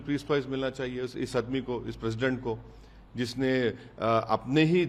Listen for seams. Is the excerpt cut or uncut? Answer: uncut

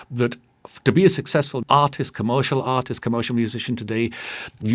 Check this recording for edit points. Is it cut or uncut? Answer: cut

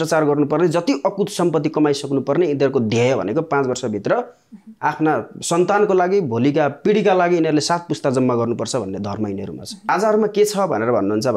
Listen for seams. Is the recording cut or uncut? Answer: cut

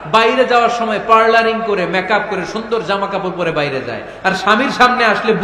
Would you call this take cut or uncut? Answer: uncut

